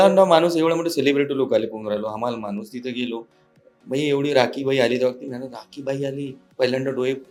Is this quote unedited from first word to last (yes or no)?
yes